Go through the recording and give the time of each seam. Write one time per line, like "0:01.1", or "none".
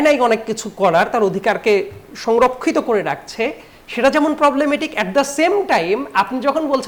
none